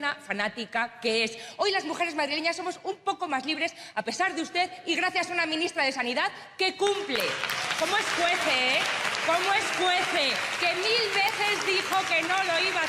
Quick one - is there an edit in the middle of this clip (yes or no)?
no